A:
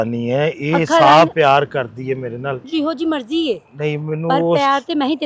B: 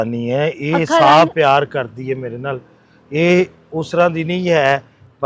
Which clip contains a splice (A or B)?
A